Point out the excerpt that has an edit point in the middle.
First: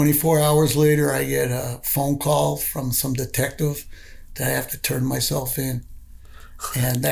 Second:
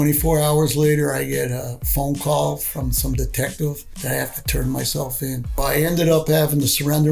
second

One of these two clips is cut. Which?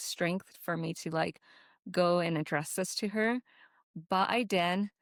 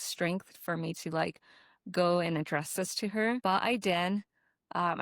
second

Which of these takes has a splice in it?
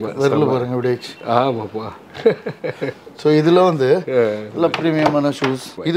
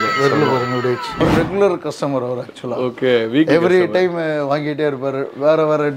second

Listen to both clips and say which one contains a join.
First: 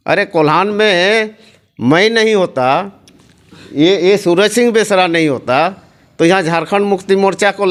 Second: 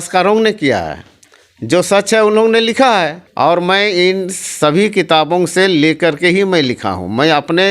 second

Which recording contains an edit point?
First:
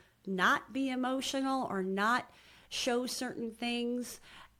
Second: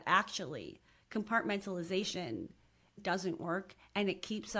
second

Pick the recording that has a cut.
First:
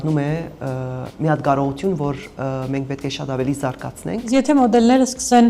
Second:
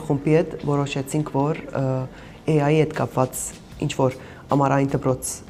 first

